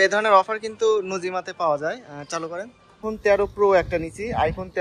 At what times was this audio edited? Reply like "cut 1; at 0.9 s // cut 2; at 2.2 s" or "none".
cut 1; at 3.1 s